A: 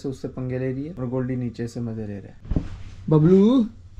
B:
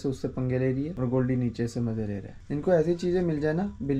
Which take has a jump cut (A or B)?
A